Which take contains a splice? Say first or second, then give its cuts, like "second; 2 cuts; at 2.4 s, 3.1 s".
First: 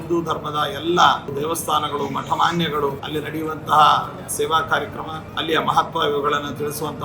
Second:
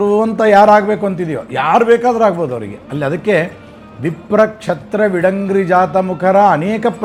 first; 4 cuts; at 1.3 s, 3.0 s, 4.3 s, 5.2 s